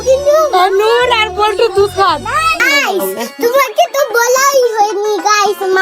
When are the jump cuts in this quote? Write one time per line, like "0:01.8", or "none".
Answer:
0:02.6